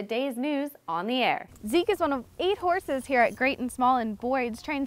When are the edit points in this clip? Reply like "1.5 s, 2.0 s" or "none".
1.5 s